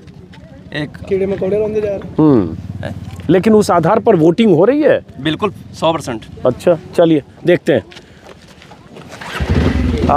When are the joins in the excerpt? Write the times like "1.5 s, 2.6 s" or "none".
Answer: none

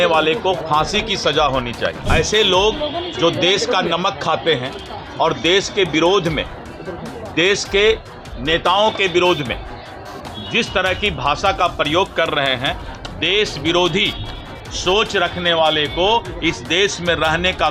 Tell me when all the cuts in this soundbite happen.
2.0 s

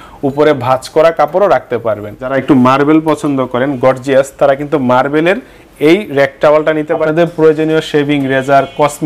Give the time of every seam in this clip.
2.4 s, 7.0 s

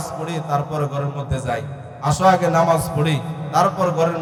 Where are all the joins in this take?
none

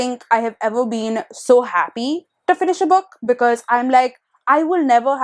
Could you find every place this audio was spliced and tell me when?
none

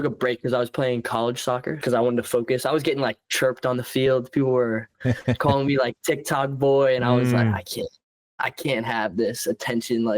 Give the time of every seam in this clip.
1.8 s

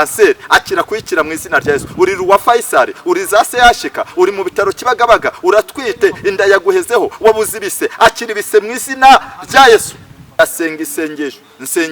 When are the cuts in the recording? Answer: 10.4 s

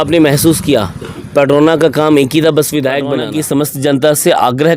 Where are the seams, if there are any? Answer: 3.2 s

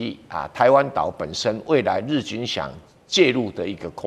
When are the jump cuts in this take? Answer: none

